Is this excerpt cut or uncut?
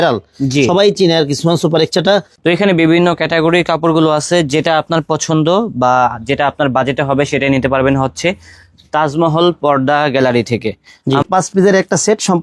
cut